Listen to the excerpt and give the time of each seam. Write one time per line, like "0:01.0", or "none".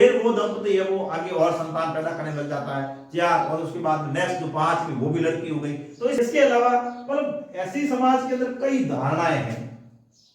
0:06.2

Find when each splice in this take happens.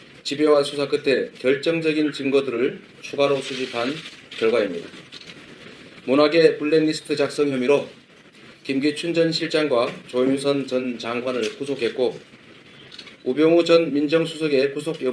none

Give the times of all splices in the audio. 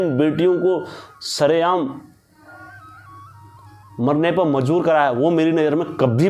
none

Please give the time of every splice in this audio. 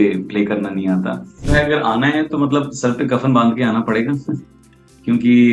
0:01.4

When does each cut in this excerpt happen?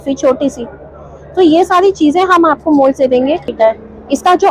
0:03.5

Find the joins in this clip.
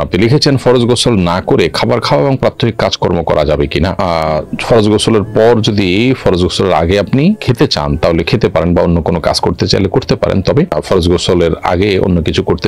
none

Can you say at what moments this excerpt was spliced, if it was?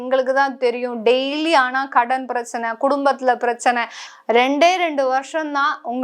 0:04.0

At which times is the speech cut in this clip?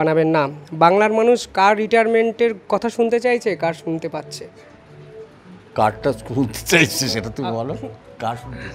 none

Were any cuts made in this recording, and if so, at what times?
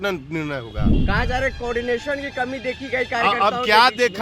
0:01.0

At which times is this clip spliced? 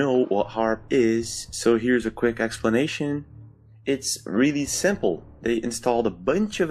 none

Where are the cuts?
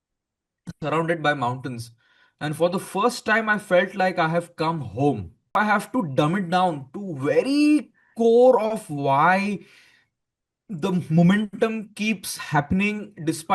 0:05.5

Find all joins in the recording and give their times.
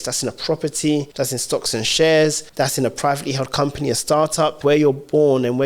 0:01.1
0:02.4
0:04.6

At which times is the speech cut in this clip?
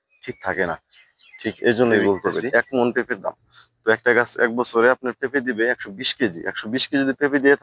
0:02.2

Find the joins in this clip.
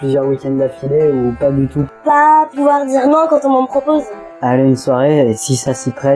0:01.9
0:04.2

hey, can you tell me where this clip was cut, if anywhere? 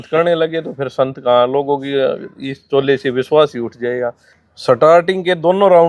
0:04.3

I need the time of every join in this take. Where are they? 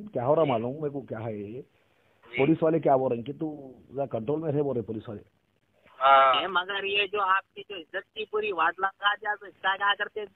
0:06.4

